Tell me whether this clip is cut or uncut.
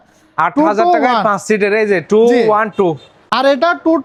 uncut